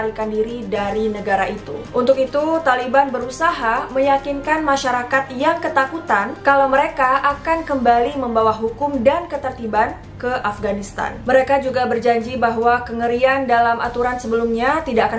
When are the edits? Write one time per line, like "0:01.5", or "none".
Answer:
none